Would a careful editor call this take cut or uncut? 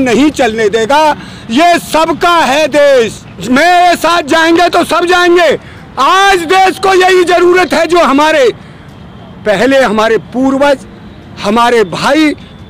cut